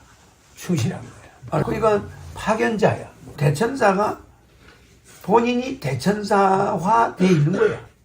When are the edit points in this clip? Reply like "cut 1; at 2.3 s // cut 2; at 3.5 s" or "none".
cut 1; at 1.5 s // cut 2; at 3.3 s